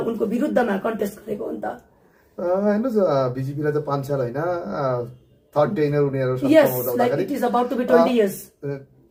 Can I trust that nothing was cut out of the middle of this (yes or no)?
yes